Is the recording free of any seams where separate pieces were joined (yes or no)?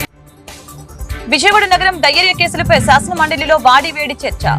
yes